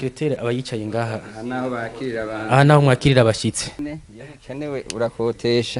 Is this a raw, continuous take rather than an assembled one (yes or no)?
no